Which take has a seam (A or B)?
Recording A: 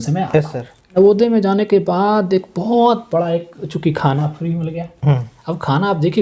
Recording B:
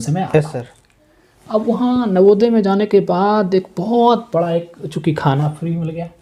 A